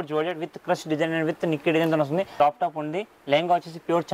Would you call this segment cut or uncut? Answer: cut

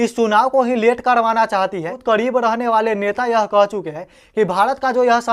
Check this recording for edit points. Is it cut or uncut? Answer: cut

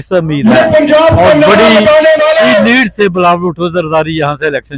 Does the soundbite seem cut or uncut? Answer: uncut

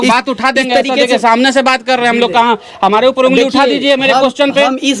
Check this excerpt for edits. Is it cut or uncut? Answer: uncut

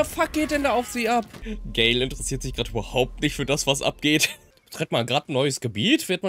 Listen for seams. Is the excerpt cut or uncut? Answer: cut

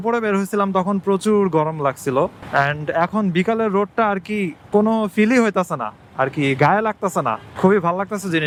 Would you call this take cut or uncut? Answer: uncut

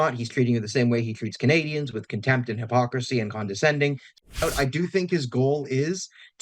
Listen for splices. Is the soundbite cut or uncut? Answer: cut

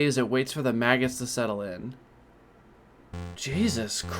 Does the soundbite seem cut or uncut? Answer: cut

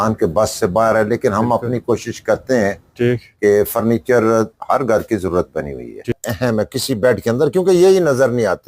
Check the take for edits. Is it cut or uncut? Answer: cut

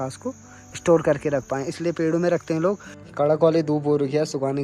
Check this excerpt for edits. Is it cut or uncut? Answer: cut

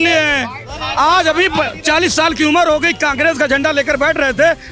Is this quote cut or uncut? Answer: uncut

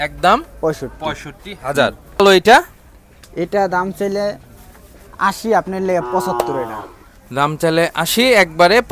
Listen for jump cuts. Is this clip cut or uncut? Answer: cut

